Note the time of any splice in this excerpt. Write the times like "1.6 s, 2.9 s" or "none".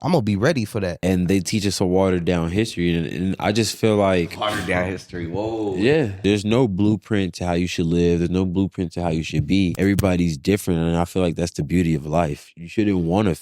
1.0 s, 6.2 s, 9.7 s